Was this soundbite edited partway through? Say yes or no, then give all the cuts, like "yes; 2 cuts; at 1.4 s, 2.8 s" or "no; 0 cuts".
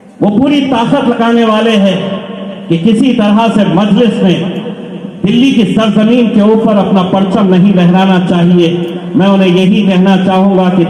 no; 0 cuts